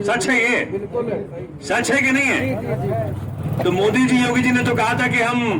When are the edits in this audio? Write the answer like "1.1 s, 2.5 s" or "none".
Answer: 3.4 s